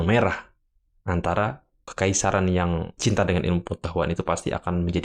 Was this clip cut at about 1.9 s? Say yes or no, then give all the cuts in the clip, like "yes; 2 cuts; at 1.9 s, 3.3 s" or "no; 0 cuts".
yes; 2 cuts; at 1.9 s, 2.9 s